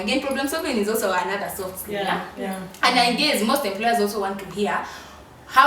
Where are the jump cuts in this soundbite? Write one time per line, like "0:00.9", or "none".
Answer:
none